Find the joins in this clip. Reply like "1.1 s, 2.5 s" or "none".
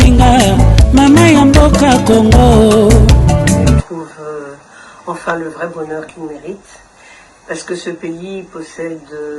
3.7 s